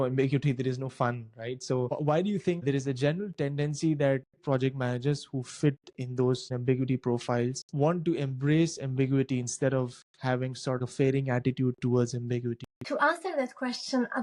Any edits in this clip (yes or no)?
no